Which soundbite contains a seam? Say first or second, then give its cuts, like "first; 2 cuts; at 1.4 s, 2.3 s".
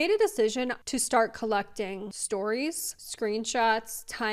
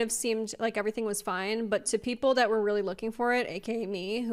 first; 2 cuts; at 0.8 s, 2.1 s